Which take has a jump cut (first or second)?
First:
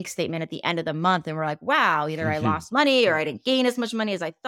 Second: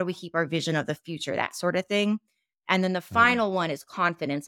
second